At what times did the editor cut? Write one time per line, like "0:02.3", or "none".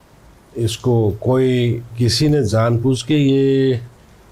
0:02.5